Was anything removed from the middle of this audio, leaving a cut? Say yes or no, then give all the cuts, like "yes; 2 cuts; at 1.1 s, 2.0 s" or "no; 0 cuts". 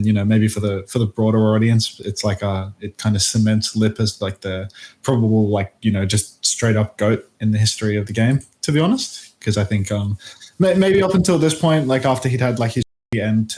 no; 0 cuts